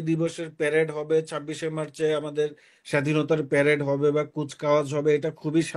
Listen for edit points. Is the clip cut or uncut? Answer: uncut